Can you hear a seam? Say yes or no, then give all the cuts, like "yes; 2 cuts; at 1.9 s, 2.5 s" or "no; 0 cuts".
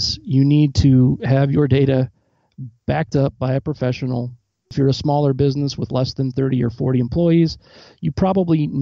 yes; 1 cut; at 4.7 s